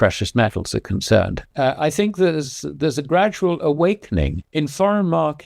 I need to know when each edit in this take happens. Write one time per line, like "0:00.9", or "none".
0:01.4
0:04.4